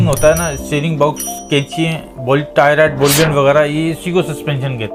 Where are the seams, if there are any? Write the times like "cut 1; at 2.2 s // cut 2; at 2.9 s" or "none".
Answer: none